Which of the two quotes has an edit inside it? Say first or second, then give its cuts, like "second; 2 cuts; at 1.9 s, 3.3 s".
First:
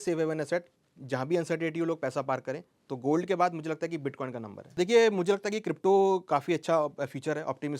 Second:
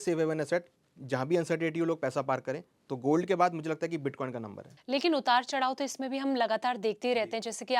first; 1 cut; at 4.8 s